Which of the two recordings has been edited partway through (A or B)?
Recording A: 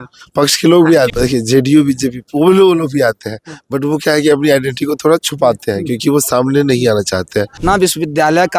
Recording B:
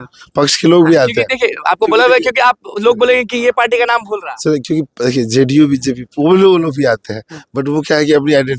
A